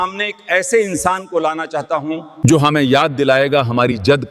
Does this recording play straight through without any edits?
no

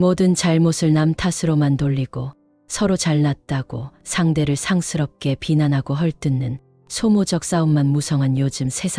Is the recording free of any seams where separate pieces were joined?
yes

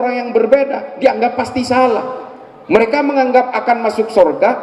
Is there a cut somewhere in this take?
no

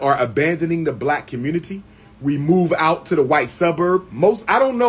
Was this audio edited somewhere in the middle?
no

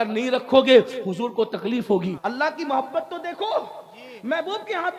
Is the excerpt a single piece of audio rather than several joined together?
no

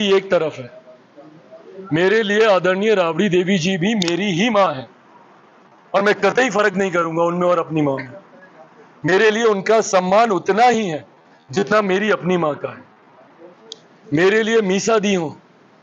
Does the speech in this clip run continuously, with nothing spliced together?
yes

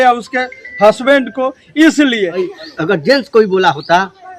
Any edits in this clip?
yes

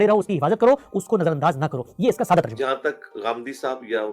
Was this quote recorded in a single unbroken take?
no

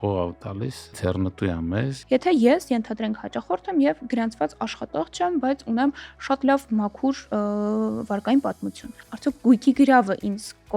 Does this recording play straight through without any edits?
no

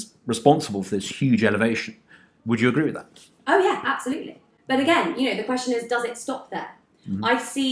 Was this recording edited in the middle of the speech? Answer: no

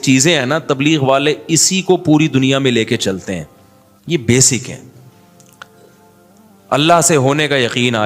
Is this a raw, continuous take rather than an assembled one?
yes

